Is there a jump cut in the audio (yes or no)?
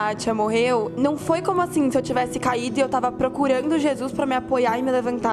yes